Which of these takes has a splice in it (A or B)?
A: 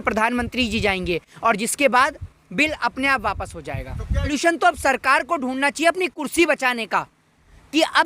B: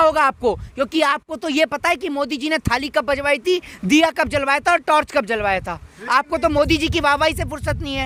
A